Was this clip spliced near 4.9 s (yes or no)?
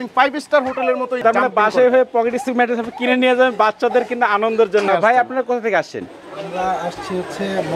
yes